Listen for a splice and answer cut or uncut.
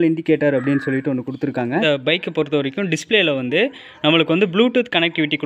cut